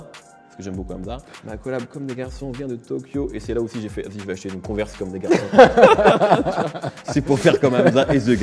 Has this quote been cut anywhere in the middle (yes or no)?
yes